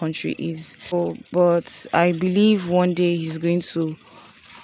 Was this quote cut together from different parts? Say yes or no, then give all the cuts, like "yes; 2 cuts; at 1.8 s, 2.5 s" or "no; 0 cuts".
yes; 1 cut; at 0.9 s